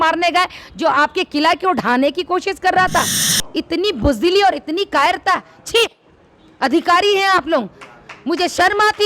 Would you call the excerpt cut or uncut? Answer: cut